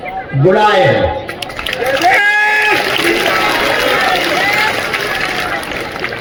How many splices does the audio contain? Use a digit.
0